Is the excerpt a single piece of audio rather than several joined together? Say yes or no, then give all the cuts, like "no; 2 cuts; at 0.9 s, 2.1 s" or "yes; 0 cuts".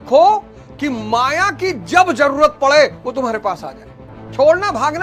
yes; 0 cuts